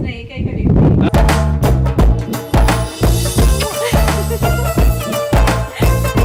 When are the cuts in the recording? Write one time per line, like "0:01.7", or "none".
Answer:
none